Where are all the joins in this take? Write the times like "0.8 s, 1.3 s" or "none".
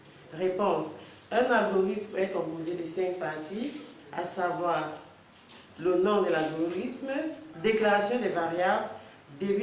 7.4 s